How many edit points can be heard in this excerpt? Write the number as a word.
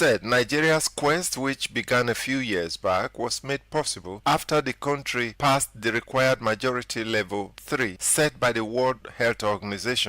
four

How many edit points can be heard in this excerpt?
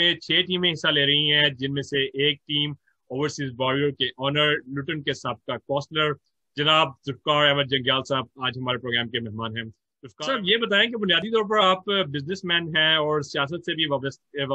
one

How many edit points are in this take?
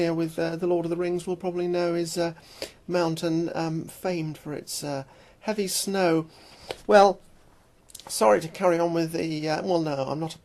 one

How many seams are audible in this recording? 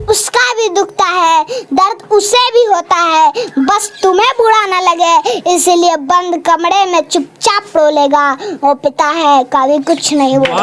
zero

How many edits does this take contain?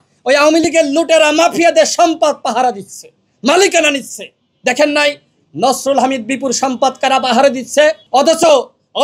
one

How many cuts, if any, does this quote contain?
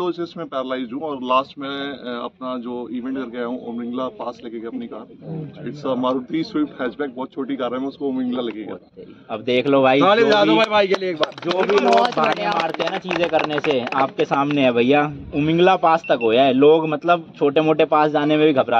zero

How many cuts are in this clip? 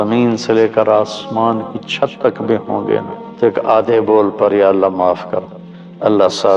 one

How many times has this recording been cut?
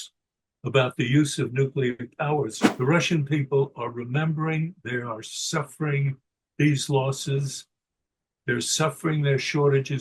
one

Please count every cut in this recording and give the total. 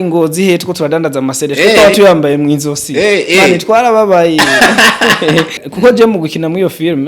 one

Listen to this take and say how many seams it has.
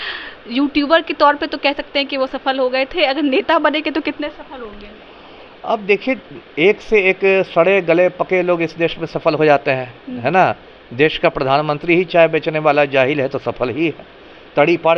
zero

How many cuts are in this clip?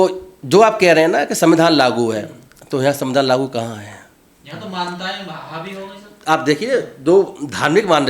zero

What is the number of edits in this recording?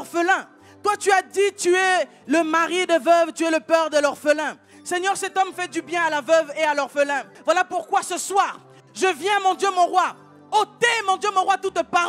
one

